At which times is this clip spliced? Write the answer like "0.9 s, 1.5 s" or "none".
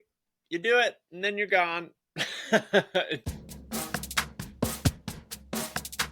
3.2 s